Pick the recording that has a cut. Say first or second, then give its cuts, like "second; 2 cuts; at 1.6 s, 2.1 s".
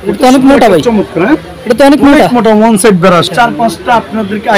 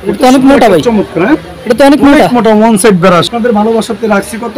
first; 1 cut; at 3.3 s